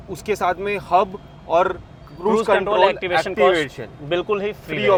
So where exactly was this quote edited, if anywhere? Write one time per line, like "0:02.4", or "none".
none